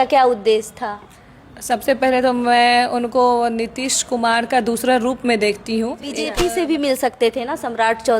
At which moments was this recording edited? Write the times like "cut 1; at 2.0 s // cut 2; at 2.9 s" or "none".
cut 1; at 6.2 s